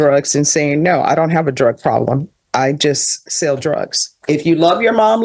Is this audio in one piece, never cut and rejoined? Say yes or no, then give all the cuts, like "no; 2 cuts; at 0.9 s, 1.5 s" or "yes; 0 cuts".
no; 1 cut; at 4.2 s